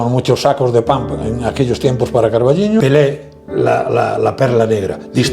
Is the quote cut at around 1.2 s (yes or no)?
no